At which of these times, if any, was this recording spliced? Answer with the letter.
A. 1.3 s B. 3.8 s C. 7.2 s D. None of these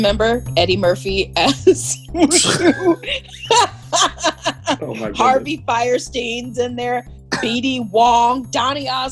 D